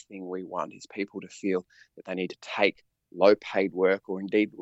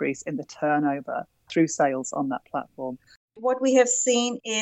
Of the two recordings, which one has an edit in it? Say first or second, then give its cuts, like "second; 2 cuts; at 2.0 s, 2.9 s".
second; 2 cuts; at 1.7 s, 3.2 s